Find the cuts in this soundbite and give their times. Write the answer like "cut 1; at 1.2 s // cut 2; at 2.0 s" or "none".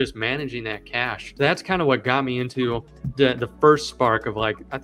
cut 1; at 1.2 s